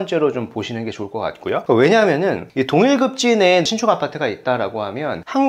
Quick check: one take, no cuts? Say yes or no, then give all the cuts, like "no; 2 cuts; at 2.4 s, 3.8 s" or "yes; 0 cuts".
yes; 0 cuts